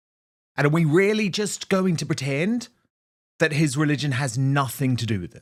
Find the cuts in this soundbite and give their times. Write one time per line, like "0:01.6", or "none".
none